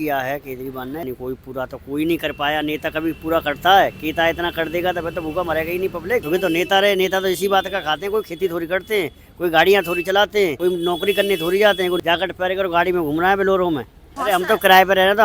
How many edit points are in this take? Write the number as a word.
five